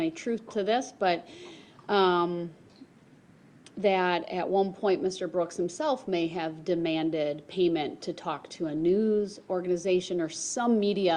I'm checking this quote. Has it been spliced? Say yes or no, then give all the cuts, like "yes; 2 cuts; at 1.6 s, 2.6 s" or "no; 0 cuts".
no; 0 cuts